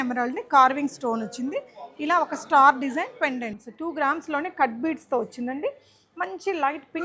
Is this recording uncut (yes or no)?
no